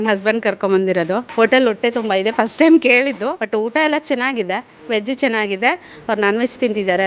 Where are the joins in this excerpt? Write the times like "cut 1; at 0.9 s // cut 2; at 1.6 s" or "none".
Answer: cut 1; at 1.3 s // cut 2; at 3.4 s // cut 3; at 4.8 s